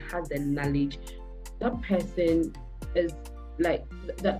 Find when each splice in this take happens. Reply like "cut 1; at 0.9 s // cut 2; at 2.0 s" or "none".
none